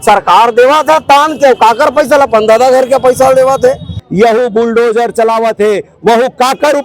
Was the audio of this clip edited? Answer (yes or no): yes